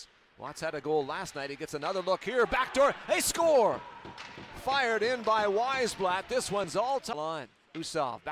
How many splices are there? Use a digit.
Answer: 1